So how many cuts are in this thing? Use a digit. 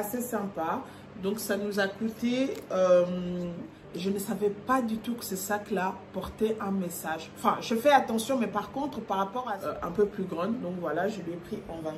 2